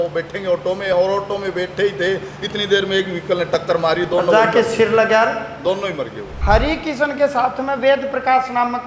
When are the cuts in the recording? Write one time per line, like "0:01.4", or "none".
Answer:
0:06.3